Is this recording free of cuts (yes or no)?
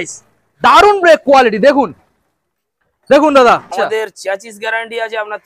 no